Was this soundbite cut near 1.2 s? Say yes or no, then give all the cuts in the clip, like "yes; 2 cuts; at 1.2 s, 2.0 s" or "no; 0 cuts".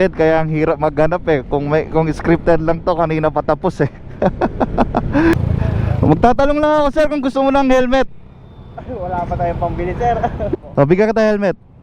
no; 2 cuts; at 5.3 s, 10.5 s